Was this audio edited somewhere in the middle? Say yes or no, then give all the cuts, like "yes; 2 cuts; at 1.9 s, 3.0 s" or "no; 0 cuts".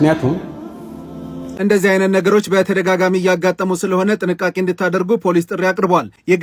yes; 1 cut; at 1.4 s